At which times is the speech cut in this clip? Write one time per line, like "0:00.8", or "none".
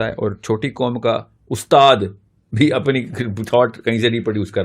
none

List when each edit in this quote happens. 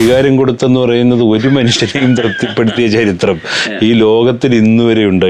none

